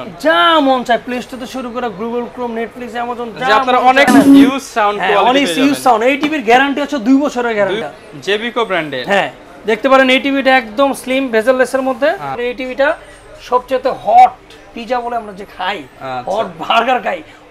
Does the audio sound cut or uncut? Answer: cut